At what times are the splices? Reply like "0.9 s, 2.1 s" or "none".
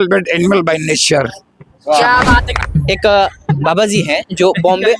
2.5 s